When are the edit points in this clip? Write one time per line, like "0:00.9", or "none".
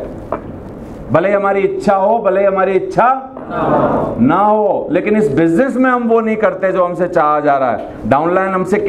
none